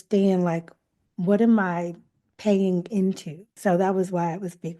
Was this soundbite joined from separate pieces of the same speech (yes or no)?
yes